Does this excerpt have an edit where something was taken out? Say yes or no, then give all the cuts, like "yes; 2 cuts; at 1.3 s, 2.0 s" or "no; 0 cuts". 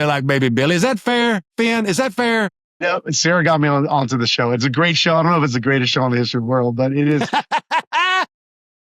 no; 0 cuts